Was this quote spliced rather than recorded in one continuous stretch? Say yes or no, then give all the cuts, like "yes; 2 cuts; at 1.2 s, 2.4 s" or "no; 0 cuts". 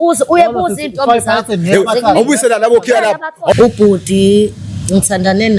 yes; 1 cut; at 3.5 s